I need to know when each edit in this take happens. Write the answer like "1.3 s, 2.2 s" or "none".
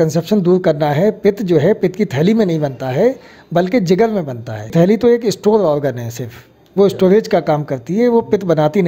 4.7 s